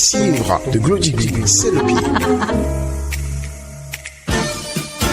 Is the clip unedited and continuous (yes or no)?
no